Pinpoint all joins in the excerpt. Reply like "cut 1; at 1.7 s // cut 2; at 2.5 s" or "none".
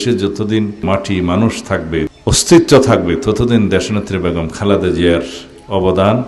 cut 1; at 0.8 s // cut 2; at 2.1 s